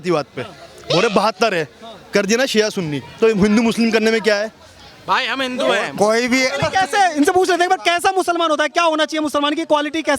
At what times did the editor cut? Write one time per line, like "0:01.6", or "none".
none